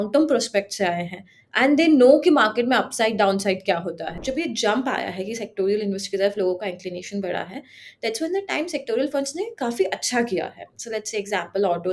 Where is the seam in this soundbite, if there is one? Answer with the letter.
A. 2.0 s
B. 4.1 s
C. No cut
B